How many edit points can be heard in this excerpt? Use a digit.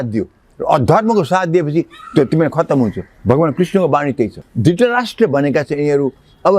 1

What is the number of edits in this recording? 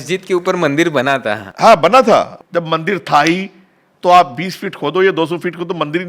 1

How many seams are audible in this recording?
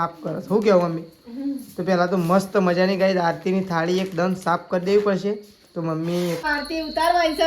1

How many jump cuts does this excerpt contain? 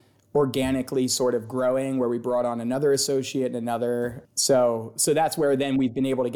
1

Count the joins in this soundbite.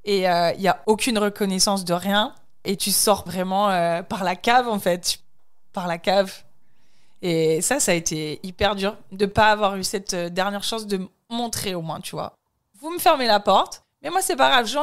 1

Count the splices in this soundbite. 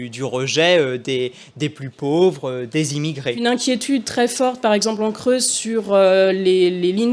1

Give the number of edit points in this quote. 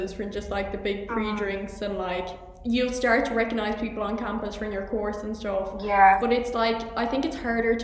0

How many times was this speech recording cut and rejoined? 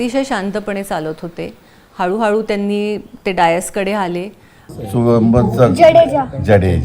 1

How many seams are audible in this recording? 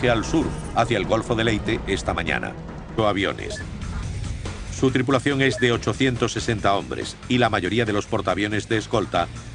0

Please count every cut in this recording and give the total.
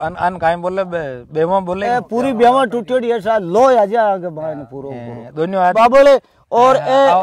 1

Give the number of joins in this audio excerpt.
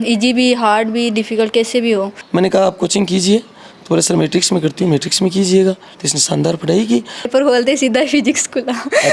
2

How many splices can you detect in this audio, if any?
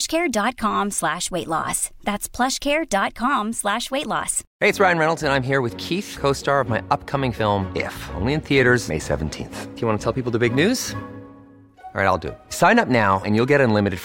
1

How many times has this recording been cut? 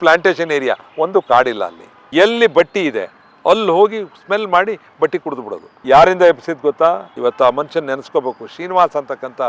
2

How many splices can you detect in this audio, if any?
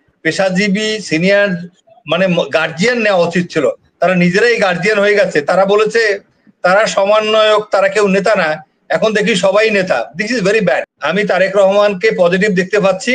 1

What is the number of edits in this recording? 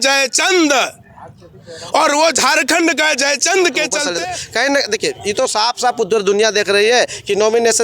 1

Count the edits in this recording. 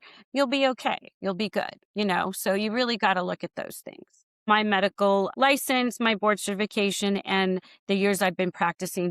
1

